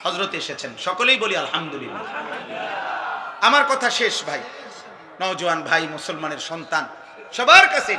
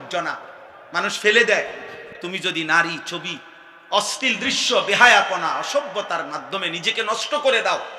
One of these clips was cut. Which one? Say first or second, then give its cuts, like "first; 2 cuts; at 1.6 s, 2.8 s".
second; 1 cut; at 2.3 s